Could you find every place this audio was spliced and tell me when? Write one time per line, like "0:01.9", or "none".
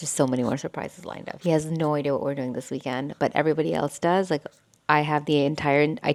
none